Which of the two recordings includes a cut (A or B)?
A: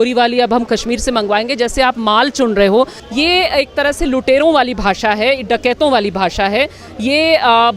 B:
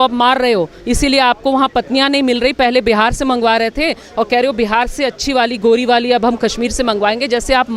A